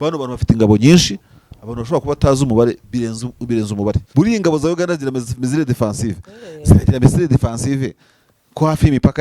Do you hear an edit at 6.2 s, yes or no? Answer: no